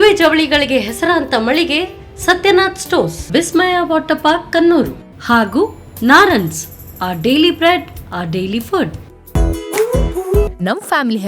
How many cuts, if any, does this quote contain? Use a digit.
0